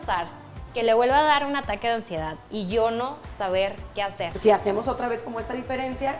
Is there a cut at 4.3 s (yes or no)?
yes